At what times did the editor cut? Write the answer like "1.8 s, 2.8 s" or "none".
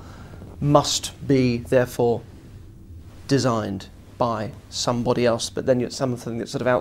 3.7 s